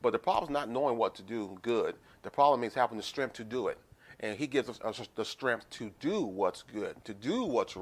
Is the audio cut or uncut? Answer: uncut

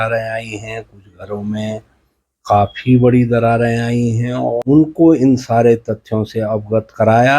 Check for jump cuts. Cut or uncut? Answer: cut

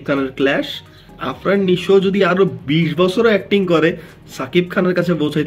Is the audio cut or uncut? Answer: cut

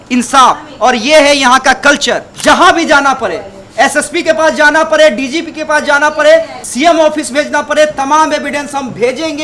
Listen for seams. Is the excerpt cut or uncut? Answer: cut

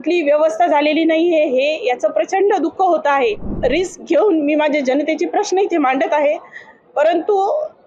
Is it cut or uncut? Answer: cut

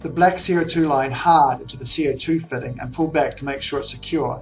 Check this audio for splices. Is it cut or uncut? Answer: uncut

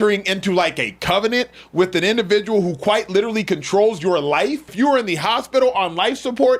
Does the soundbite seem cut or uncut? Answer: cut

